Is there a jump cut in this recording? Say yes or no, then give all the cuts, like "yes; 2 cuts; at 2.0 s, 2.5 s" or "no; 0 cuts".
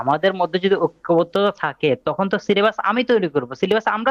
no; 0 cuts